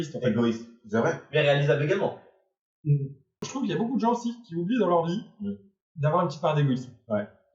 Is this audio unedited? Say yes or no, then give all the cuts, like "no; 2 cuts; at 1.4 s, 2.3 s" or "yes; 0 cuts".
no; 1 cut; at 3.4 s